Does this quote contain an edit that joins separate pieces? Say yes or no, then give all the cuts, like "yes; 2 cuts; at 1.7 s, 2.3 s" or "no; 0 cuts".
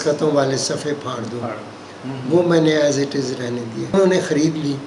yes; 1 cut; at 3.9 s